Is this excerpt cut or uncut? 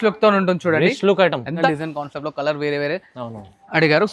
cut